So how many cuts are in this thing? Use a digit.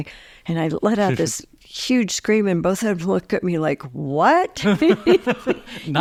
0